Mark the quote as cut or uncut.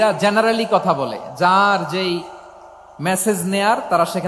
uncut